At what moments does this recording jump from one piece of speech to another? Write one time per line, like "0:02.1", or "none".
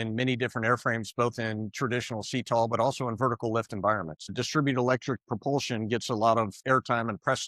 0:04.3
0:06.6